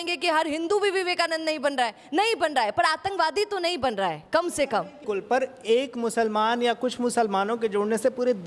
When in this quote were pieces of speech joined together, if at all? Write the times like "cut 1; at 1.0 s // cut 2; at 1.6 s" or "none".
cut 1; at 5.0 s